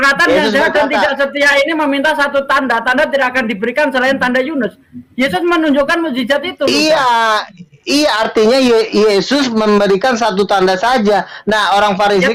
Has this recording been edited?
no; 0 cuts

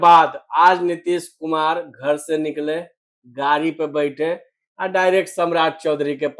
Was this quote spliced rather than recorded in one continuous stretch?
no; 0 cuts

